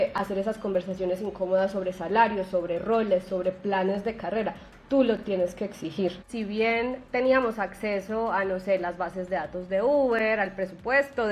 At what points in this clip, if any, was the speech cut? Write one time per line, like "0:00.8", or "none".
0:06.3